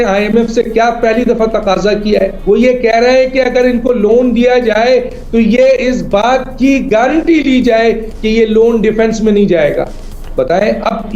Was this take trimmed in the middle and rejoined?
yes; 1 cut; at 2.4 s

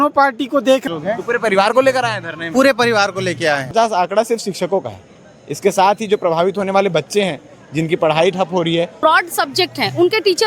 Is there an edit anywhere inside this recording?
yes; 3 cuts; at 0.8 s, 3.7 s, 8.9 s

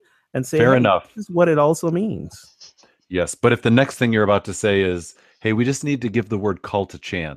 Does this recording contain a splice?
no; 0 cuts

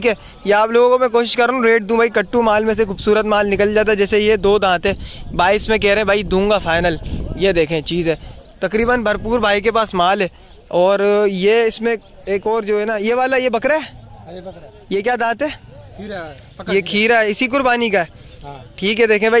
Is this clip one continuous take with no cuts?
yes; 0 cuts

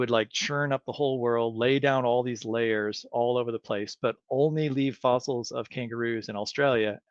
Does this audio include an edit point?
no; 0 cuts

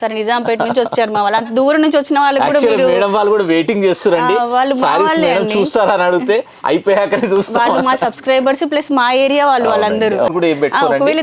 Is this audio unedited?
no; 1 cut; at 10.3 s

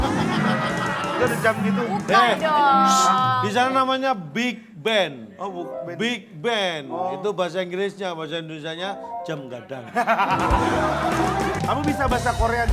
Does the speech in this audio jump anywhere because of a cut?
no; 0 cuts

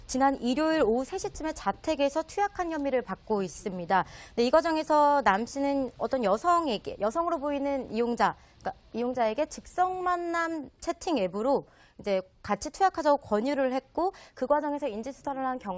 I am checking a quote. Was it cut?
yes; 1 cut; at 11.3 s

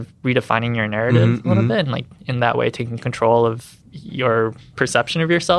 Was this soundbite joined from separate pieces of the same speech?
yes; 1 cut; at 4.6 s

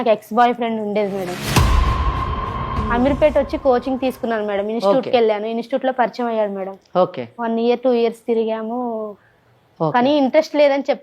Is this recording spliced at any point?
yes; 1 cut; at 2.6 s

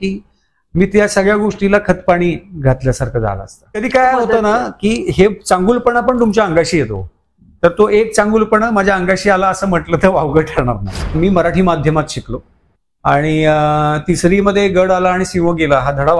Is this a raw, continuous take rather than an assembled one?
no; 2 cuts; at 3.8 s, 11.1 s

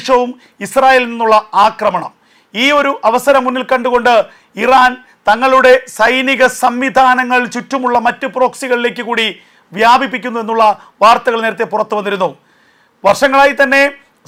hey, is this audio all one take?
yes; 0 cuts

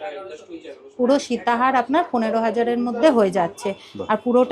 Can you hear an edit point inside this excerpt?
no; 0 cuts

